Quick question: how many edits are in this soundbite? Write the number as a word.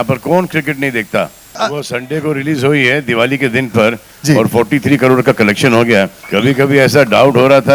two